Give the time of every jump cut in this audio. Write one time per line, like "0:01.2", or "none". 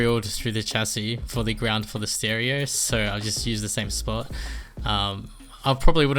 none